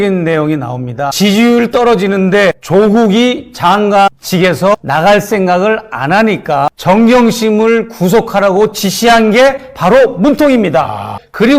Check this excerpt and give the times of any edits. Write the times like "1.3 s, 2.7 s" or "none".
1.1 s, 6.8 s

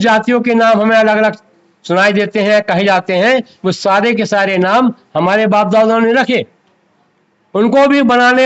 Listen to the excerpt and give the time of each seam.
none

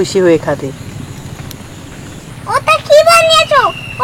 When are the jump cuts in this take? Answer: 2.3 s

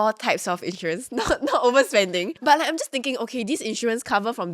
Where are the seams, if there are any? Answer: 2.4 s

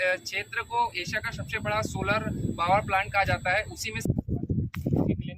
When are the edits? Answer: 4.1 s

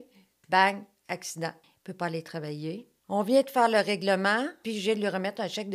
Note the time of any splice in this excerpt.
1.7 s, 2.9 s, 4.6 s

